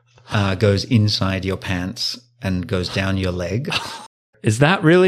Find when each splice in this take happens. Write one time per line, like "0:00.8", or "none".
0:04.1

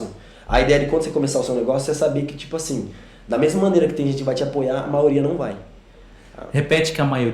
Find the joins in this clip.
none

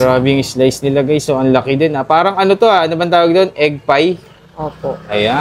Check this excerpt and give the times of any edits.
none

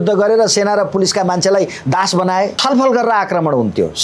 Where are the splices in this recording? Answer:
0:02.6

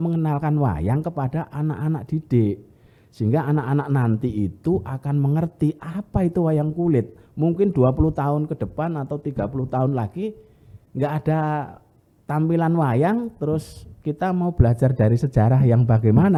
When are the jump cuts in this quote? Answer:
none

